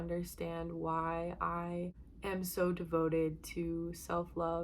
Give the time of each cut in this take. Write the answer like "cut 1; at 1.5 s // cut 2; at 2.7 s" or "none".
cut 1; at 2.1 s